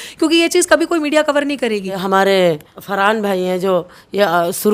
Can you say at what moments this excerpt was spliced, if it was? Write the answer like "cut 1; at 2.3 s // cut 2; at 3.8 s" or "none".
cut 1; at 1.9 s // cut 2; at 2.7 s